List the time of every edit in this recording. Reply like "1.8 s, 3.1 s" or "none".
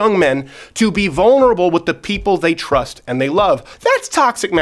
3.7 s